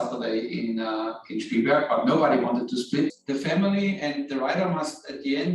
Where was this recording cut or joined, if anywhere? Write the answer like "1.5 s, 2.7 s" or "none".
3.2 s